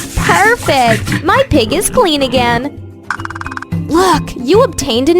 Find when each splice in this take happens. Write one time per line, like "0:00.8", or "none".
0:03.3